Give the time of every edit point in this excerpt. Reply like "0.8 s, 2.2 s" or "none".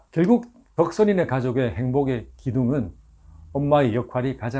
none